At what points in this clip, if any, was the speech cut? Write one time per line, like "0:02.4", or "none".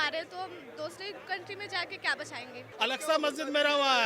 0:02.6